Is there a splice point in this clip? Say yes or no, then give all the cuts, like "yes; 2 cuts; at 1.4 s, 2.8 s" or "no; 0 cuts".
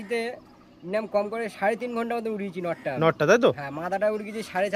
no; 0 cuts